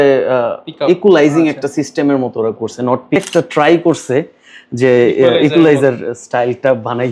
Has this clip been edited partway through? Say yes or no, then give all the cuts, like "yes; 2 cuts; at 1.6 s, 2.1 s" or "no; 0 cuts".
yes; 1 cut; at 3.2 s